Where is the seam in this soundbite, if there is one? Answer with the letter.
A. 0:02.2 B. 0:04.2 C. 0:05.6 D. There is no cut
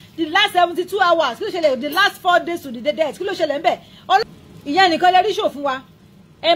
B